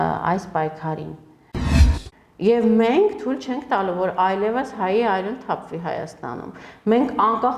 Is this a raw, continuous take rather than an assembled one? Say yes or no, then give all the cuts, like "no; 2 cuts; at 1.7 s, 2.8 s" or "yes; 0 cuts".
no; 1 cut; at 1.7 s